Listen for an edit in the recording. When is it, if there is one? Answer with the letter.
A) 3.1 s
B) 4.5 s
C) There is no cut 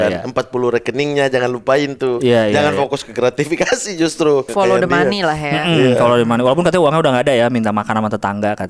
B